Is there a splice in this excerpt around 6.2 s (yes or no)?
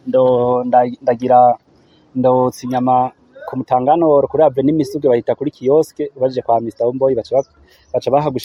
no